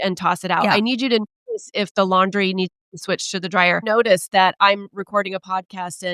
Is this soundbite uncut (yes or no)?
no